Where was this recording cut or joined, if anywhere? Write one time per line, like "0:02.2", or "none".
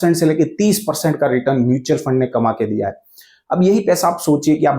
none